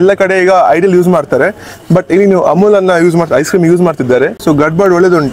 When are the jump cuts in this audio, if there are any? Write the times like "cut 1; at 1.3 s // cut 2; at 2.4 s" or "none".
cut 1; at 4.4 s